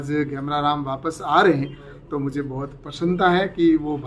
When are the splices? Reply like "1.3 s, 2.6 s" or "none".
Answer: none